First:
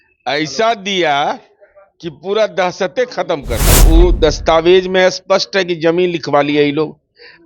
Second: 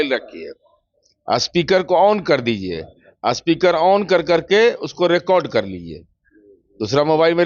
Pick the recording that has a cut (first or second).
first